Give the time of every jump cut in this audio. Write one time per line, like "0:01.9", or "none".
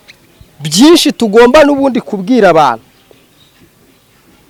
none

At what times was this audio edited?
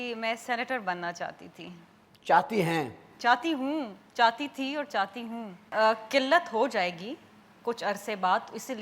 0:05.6

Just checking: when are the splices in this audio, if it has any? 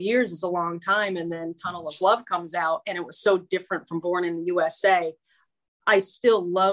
none

